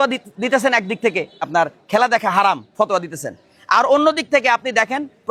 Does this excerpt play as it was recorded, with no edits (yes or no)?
yes